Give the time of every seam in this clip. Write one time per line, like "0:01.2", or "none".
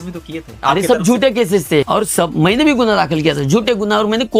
0:01.9